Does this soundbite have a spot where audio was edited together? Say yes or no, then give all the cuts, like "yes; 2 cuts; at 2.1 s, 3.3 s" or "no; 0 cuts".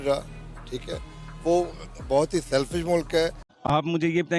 yes; 1 cut; at 3.5 s